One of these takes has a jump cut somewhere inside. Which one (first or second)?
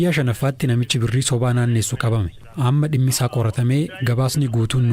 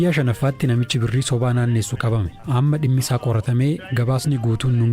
second